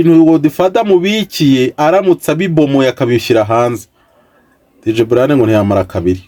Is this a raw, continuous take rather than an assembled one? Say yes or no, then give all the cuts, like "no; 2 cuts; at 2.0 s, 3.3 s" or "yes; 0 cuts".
yes; 0 cuts